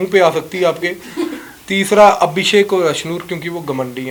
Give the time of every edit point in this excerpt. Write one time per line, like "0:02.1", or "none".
none